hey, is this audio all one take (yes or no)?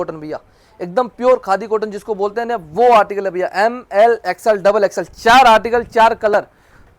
yes